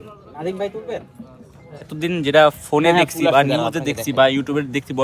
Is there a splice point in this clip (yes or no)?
yes